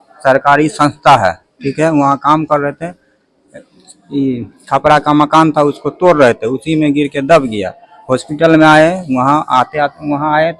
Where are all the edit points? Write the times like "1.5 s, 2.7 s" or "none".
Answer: none